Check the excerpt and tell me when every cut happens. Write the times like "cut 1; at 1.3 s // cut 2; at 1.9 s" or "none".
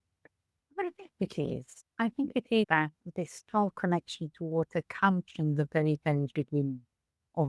cut 1; at 2.7 s

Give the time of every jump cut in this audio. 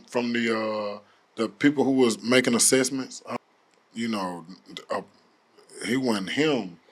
cut 1; at 3.2 s

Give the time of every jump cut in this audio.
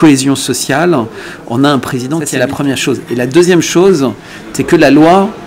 none

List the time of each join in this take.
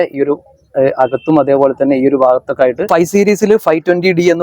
cut 1; at 2.9 s

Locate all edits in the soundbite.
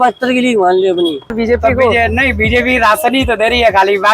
cut 1; at 1.3 s

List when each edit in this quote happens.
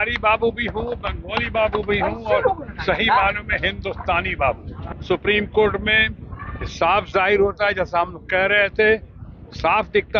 cut 1; at 4.7 s

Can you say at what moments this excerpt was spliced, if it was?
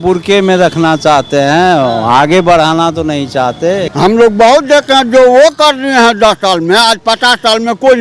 cut 1; at 3.9 s

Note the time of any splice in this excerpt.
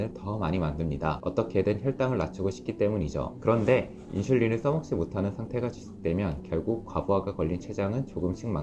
cut 1; at 1.2 s // cut 2; at 3.3 s

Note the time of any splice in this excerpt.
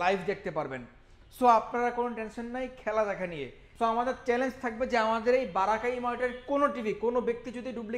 cut 1; at 3.6 s

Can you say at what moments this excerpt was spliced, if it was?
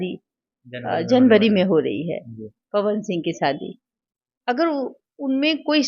none

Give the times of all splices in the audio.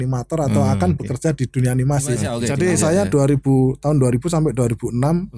cut 1; at 2.3 s

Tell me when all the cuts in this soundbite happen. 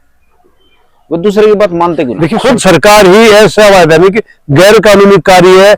cut 1; at 2.3 s

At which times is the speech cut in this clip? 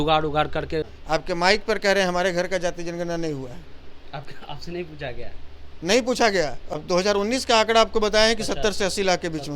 cut 1; at 0.9 s // cut 2; at 6.7 s

